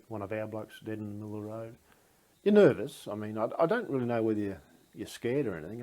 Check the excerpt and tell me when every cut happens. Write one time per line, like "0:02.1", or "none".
0:02.3